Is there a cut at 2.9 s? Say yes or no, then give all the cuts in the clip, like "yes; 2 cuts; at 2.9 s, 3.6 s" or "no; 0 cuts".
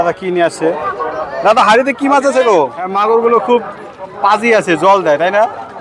yes; 1 cut; at 2.9 s